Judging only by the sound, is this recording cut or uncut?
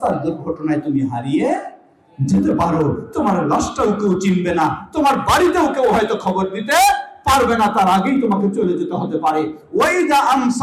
uncut